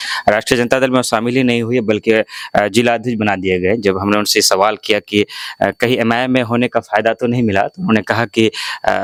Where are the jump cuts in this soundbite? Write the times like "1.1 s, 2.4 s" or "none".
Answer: none